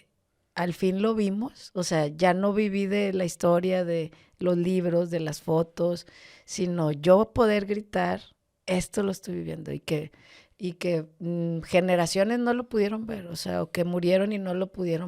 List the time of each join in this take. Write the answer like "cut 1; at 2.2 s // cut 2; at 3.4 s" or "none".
none